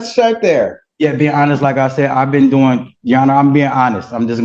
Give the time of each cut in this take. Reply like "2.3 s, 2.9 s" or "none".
none